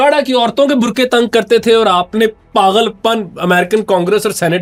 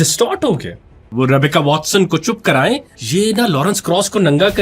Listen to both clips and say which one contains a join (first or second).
second